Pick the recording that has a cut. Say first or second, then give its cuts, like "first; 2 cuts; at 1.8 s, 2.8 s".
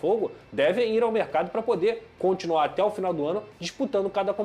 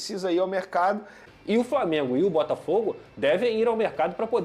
second; 1 cut; at 1.2 s